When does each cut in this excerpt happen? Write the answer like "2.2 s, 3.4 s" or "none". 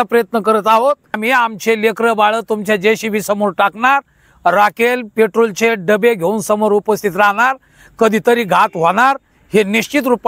1.2 s